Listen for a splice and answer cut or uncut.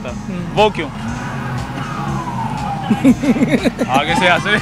cut